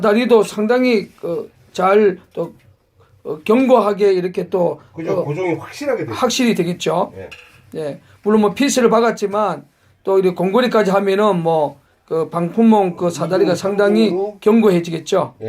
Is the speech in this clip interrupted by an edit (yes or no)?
yes